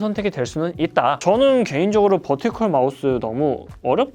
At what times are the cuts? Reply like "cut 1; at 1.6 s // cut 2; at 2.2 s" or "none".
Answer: none